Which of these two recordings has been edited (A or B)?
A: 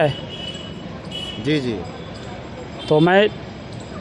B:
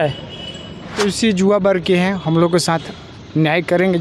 B